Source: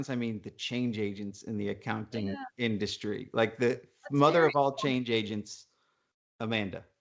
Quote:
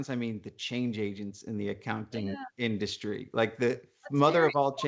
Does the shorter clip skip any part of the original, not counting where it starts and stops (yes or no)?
no